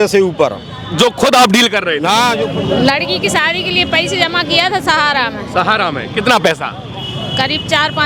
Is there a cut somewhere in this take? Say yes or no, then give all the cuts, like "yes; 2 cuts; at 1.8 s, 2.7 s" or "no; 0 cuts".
yes; 1 cut; at 2.4 s